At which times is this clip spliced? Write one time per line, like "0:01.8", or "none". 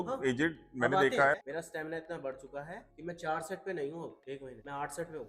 0:01.4